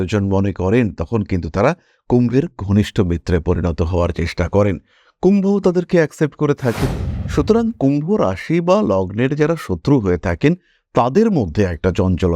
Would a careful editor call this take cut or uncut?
uncut